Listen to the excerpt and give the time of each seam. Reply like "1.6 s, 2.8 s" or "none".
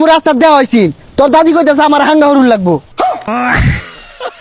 3.1 s